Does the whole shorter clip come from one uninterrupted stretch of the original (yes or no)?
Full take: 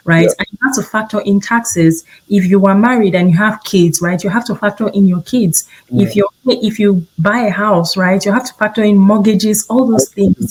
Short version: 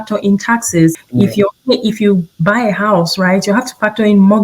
no